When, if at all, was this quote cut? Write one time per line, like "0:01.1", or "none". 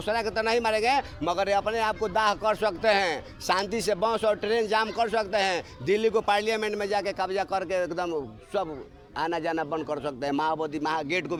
none